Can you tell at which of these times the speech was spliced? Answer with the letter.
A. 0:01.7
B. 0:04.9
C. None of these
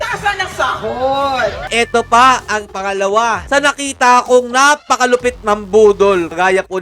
A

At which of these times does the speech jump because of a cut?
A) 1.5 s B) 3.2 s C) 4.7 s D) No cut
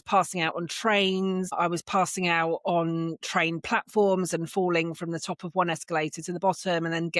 A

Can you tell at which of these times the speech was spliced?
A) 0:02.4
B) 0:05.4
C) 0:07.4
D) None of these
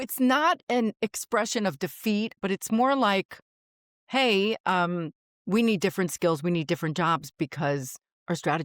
A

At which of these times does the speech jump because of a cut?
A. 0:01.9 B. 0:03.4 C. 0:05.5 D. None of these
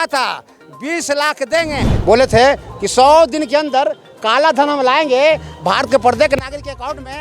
A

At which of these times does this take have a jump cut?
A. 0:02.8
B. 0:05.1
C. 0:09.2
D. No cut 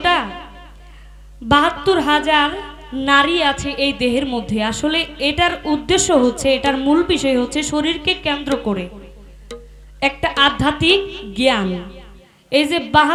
D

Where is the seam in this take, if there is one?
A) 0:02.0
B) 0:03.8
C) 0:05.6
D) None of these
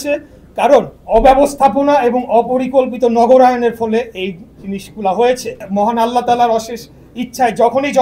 C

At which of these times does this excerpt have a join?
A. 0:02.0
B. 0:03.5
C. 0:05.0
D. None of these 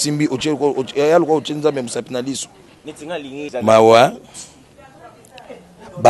B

